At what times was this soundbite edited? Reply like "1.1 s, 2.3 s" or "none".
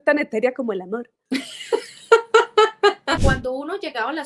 1.1 s, 3.2 s